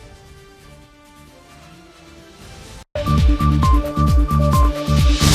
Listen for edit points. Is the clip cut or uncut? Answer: cut